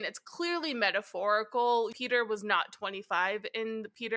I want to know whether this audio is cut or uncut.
cut